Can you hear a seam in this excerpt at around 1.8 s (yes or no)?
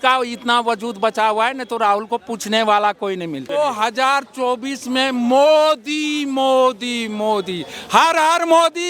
no